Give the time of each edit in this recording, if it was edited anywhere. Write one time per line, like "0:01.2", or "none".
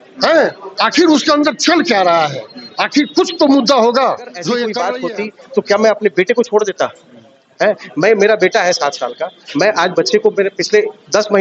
0:04.8